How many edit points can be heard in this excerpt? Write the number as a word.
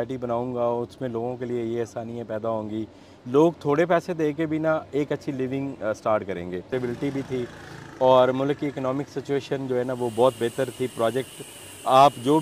one